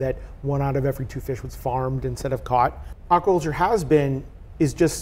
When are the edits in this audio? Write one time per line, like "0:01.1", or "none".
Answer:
0:02.9

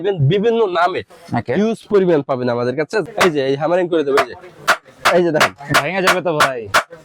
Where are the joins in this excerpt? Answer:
0:03.1

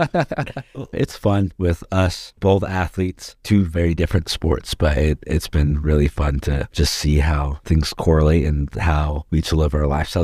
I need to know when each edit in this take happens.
0:00.9

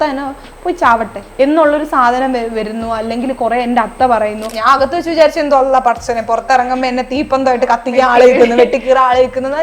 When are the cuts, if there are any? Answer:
0:01.2
0:04.5

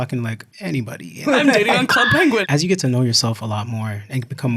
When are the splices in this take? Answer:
0:01.2
0:02.4

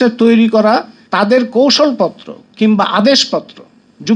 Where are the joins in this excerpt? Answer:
0:01.0

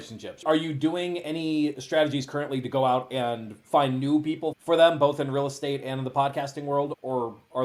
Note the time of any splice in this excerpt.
none

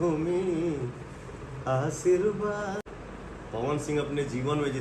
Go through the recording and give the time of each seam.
0:02.9

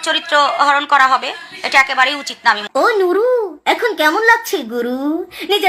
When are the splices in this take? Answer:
0:02.6

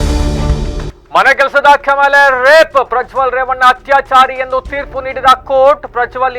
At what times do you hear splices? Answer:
0:00.9

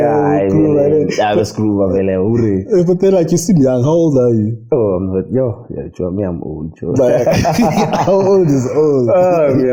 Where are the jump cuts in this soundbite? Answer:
none

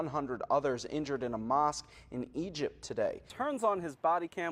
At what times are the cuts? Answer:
0:03.3

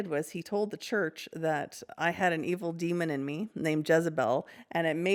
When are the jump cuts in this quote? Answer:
none

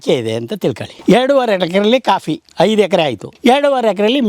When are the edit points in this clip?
0:00.9
0:02.4
0:03.2

